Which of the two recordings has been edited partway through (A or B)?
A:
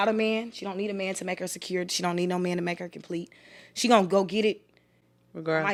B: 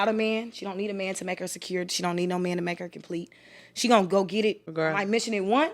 B